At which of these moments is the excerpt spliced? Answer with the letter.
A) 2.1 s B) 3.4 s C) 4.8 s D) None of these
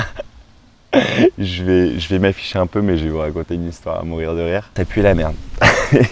C